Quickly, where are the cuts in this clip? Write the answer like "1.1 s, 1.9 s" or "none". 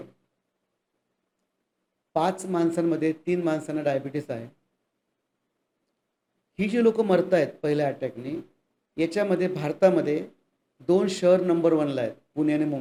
none